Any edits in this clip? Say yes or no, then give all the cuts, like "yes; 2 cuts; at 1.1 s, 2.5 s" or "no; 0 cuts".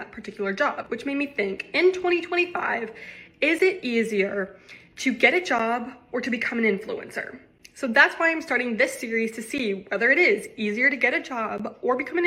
no; 0 cuts